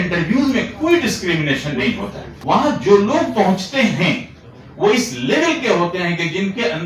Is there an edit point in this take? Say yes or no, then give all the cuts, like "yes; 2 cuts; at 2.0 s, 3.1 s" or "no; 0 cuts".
yes; 1 cut; at 2.3 s